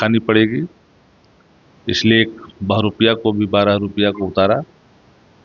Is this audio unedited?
yes; 0 cuts

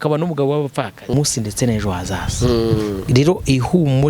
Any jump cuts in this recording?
yes; 1 cut; at 1.1 s

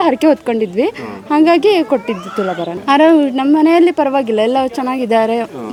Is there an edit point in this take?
no; 0 cuts

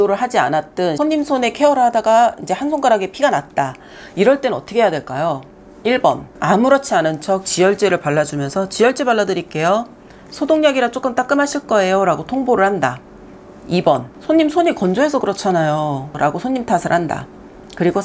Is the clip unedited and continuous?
no; 4 cuts; at 1.0 s, 6.3 s, 14.1 s, 16.1 s

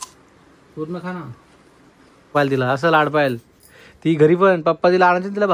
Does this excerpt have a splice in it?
yes; 1 cut; at 2.3 s

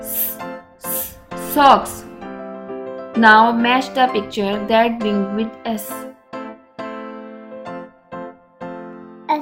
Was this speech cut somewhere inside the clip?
no; 0 cuts

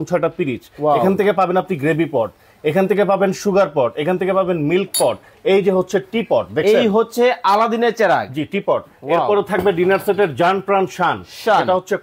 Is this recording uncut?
yes; 0 cuts

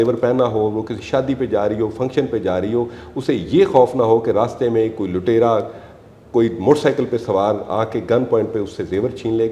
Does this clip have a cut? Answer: no; 0 cuts

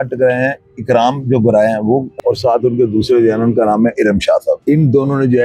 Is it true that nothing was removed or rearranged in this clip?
no; 2 cuts; at 2.1 s, 4.6 s

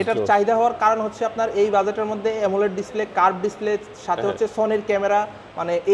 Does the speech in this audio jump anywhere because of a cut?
no; 0 cuts

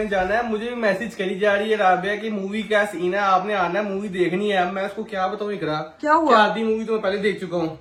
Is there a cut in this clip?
no; 0 cuts

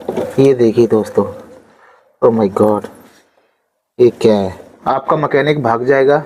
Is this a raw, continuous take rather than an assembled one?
no; 1 cut; at 4.8 s

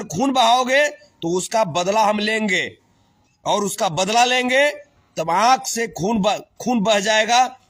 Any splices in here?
no; 0 cuts

